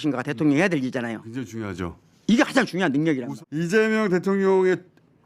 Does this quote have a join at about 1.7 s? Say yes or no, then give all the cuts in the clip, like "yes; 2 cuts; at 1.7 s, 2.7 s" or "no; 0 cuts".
no; 1 cut; at 3.3 s